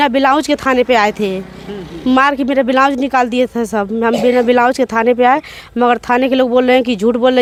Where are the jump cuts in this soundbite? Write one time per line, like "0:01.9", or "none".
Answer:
none